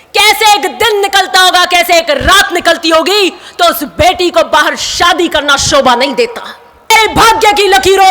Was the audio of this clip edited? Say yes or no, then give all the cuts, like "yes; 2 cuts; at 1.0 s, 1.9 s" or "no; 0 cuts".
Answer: yes; 1 cut; at 6.9 s